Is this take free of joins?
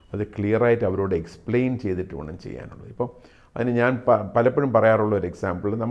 yes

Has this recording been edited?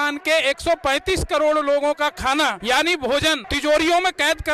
yes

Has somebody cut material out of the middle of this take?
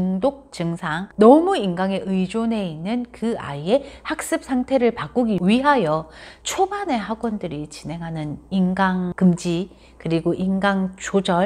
yes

